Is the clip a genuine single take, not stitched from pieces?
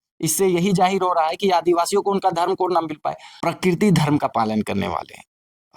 no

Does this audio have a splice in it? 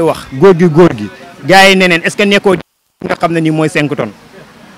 no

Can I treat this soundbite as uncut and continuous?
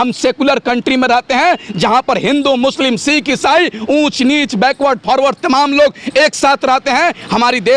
yes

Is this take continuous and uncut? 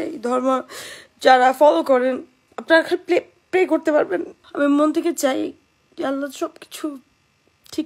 no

